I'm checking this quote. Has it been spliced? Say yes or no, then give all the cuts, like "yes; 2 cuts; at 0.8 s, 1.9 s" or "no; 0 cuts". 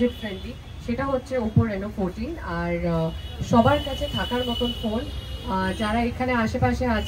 no; 0 cuts